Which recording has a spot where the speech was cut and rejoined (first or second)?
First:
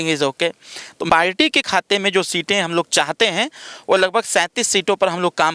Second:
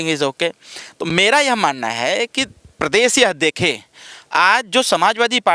first